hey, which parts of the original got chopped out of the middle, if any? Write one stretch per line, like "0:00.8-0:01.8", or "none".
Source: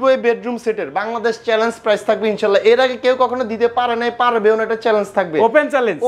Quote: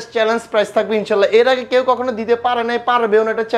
none